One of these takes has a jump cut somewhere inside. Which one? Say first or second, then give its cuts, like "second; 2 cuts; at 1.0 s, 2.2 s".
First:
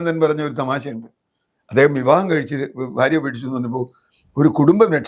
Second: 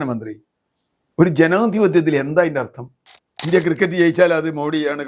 second; 1 cut; at 3.3 s